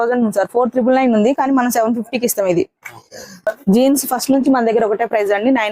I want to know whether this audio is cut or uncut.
cut